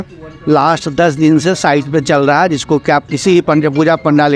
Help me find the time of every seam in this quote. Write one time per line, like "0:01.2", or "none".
none

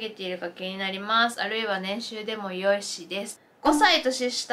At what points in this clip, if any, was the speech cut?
0:03.4

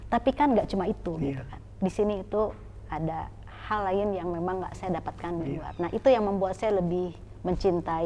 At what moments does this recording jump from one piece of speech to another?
none

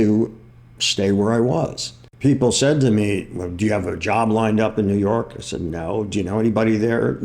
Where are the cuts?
0:02.0

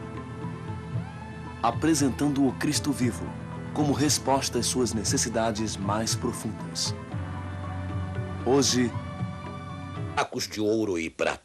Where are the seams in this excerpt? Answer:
none

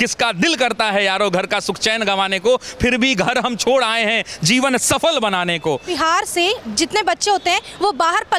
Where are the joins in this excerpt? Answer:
0:05.9

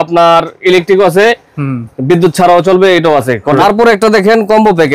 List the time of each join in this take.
0:03.6

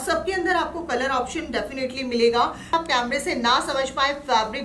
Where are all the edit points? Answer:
0:02.7

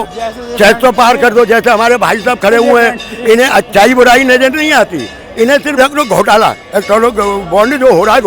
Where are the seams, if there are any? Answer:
none

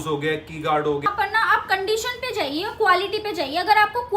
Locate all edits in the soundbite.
0:01.1

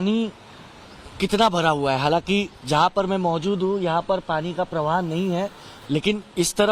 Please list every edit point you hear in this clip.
none

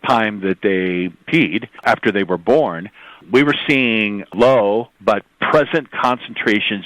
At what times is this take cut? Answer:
0:01.4

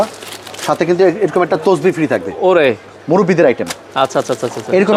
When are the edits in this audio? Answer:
none

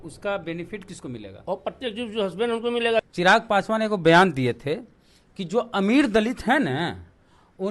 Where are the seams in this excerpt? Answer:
0:03.0

